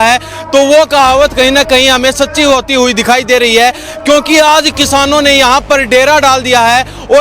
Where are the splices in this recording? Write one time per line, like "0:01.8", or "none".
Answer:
none